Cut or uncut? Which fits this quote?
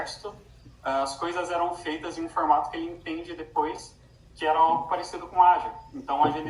uncut